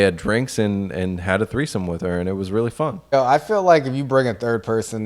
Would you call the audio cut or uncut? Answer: cut